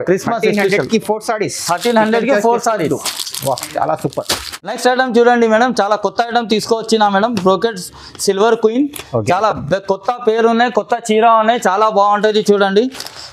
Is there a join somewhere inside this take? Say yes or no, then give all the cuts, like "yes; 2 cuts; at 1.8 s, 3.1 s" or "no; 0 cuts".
no; 0 cuts